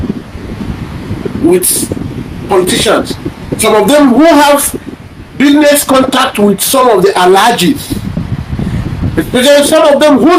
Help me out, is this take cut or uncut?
uncut